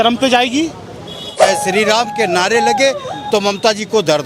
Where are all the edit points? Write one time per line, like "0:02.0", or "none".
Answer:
0:01.4